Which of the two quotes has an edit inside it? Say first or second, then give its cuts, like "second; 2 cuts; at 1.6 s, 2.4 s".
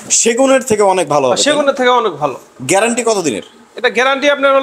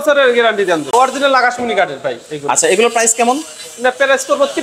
second; 1 cut; at 0.9 s